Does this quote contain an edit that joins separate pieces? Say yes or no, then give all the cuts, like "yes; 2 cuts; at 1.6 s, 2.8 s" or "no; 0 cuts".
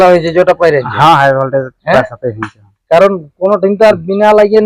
no; 0 cuts